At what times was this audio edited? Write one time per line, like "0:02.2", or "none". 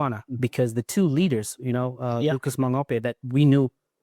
none